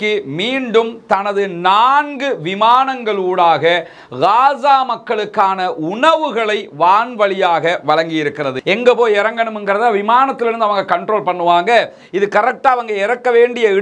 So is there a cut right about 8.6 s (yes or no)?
yes